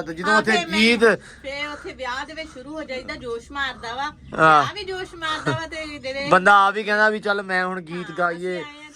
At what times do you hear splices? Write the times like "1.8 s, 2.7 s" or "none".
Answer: none